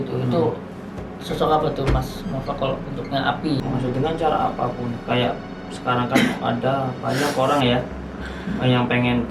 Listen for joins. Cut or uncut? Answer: cut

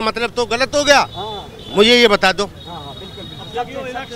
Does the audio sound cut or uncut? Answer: uncut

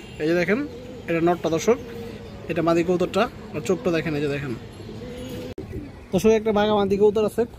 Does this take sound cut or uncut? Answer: cut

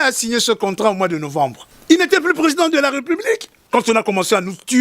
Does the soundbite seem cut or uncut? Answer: cut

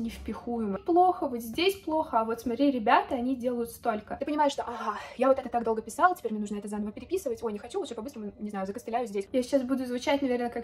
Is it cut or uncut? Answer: cut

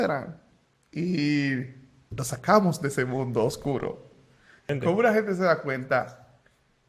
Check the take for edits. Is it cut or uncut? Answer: cut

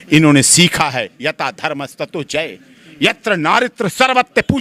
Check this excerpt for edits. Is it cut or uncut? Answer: uncut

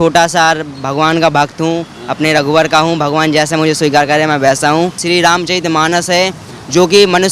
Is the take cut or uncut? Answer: cut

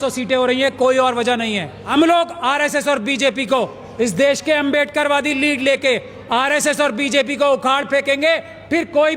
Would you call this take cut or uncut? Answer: cut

